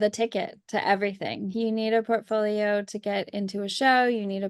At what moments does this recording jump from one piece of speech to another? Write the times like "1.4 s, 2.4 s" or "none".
1.5 s